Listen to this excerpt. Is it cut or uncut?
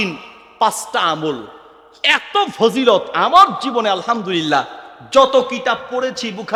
uncut